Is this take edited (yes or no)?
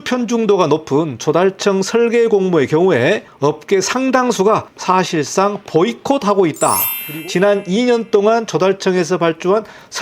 yes